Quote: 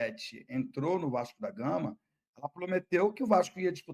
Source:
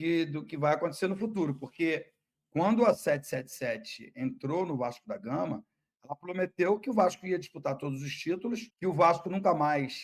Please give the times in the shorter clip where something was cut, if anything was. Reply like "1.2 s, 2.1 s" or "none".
none